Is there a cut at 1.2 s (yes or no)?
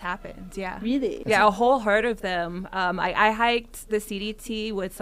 yes